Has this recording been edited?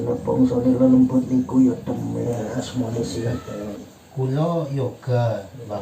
yes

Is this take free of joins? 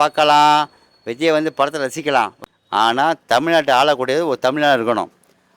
no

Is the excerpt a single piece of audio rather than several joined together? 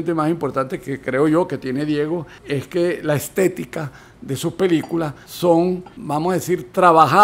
yes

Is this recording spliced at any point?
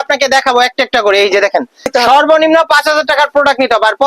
yes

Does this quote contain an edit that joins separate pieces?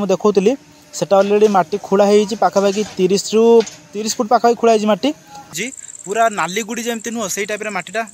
yes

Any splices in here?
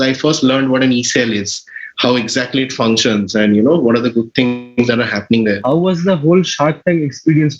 yes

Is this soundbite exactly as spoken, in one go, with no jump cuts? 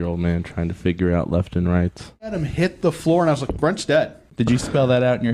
no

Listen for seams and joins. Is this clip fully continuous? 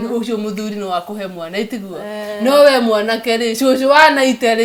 yes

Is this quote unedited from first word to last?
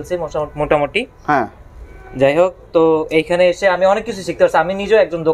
yes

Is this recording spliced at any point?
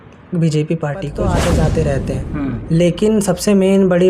yes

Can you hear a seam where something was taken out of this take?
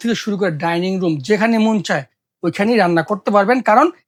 no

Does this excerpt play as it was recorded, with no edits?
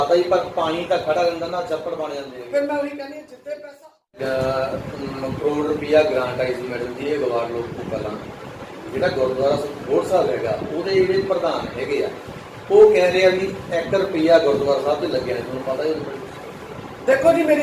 no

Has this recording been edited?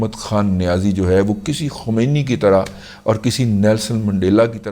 no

